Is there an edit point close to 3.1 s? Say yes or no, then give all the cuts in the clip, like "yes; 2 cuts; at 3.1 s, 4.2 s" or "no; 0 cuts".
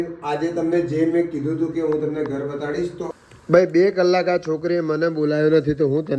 yes; 1 cut; at 3.1 s